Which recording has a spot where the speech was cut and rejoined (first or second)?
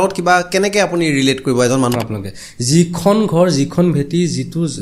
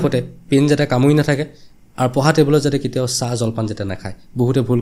first